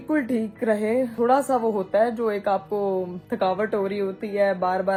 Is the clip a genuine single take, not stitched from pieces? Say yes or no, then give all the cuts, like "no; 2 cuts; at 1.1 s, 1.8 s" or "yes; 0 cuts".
yes; 0 cuts